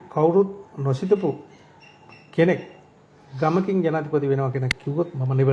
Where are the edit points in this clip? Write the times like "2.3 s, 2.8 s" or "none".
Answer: none